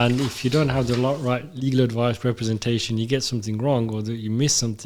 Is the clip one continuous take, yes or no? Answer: yes